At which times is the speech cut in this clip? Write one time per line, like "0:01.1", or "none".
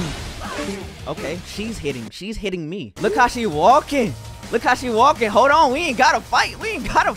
0:02.9